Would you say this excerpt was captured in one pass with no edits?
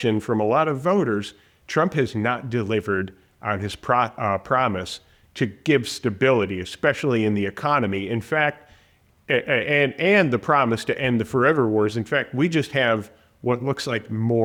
yes; 0 cuts

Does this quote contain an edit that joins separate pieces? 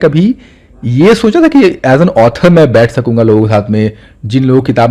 no; 0 cuts

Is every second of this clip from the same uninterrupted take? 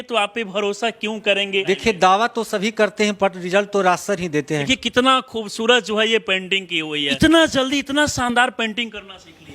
no; 3 cuts; at 1.6 s, 4.7 s, 7.1 s

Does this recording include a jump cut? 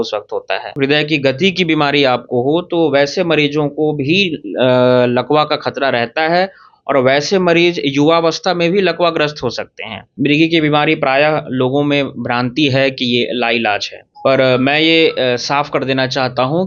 yes; 2 cuts; at 0.8 s, 10.1 s

